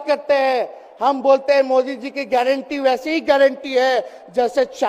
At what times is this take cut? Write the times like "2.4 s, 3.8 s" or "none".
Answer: none